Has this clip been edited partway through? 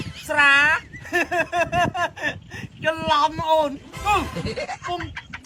no; 0 cuts

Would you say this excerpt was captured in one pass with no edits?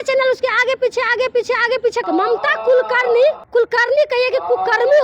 no; 2 cuts; at 2.0 s, 3.4 s

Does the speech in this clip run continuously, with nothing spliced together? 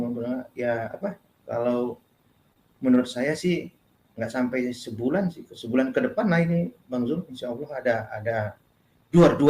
yes; 0 cuts

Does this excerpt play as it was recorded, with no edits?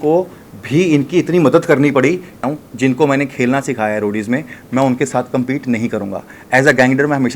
no; 1 cut; at 2.4 s

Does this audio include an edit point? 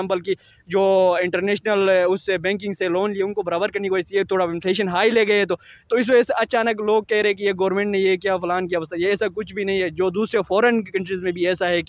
no; 0 cuts

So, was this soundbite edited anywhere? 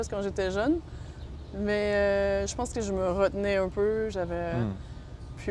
no; 0 cuts

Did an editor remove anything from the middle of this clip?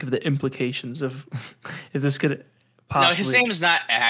no; 0 cuts

